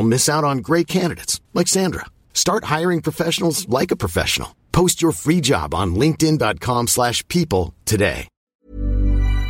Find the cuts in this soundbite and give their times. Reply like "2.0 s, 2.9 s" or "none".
8.3 s